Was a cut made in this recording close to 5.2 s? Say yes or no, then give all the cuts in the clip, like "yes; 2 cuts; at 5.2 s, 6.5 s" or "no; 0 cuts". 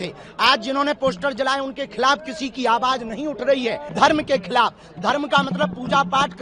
no; 1 cut; at 3.8 s